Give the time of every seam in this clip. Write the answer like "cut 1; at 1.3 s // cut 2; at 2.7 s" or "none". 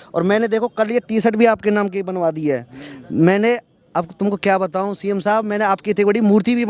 none

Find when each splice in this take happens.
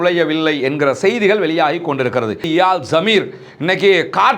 cut 1; at 2.5 s

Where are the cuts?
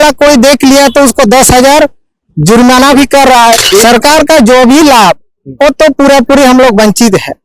cut 1; at 3.6 s

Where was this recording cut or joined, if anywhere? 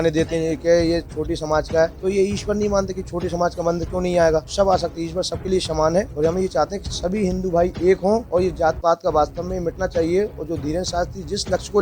cut 1; at 2.0 s // cut 2; at 4.5 s // cut 3; at 6.1 s // cut 4; at 8.2 s

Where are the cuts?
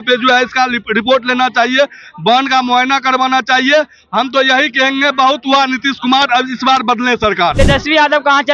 cut 1; at 7.6 s

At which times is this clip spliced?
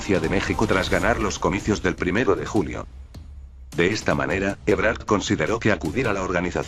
cut 1; at 2.0 s

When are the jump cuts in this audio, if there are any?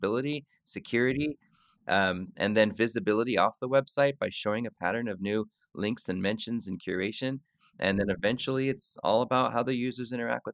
none

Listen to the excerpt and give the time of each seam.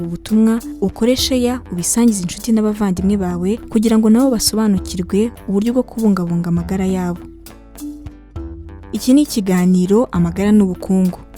cut 1; at 7.2 s // cut 2; at 8.7 s

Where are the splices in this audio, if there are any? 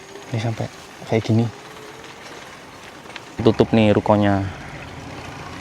cut 1; at 3.4 s

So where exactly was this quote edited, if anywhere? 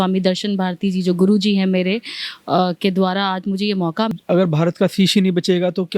cut 1; at 4.1 s

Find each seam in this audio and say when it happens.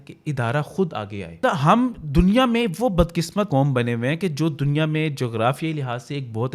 cut 1; at 1.4 s // cut 2; at 3.5 s

